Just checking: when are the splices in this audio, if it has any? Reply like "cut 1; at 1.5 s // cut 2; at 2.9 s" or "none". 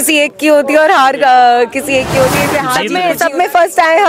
cut 1; at 2.8 s